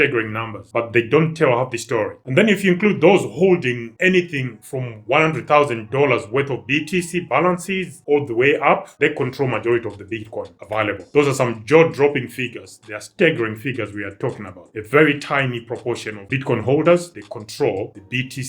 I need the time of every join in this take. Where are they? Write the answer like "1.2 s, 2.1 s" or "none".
2.2 s